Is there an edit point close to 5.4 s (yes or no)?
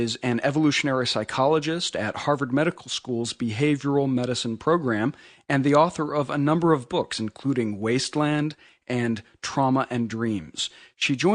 no